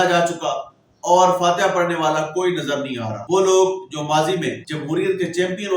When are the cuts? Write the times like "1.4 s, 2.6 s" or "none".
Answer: 3.1 s, 4.7 s